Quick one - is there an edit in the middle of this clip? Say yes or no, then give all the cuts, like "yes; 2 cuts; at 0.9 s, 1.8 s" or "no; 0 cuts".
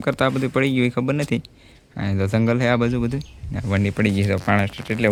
no; 0 cuts